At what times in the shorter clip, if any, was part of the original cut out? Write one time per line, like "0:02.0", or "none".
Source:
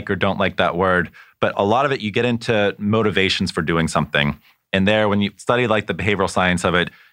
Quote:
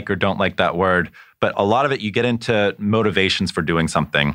none